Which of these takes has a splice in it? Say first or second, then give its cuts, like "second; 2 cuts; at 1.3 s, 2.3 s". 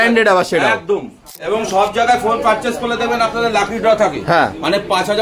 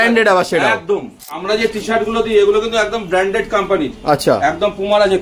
second; 1 cut; at 1.3 s